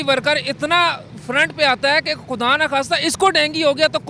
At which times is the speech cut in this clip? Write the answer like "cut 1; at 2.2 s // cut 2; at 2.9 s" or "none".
none